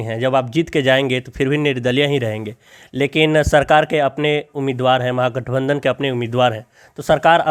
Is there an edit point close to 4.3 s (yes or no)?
no